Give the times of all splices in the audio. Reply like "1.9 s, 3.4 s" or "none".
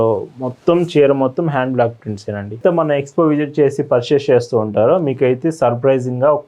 2.6 s

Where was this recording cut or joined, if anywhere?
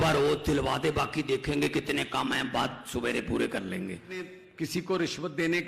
4.4 s

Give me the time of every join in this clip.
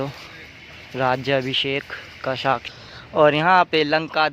2.7 s

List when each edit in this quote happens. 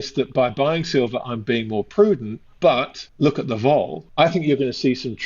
3.0 s, 4.0 s

